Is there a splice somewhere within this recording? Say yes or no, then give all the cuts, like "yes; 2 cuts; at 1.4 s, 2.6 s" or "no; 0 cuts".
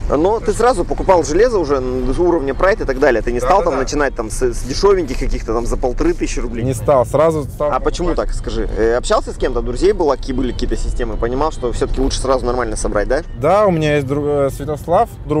no; 0 cuts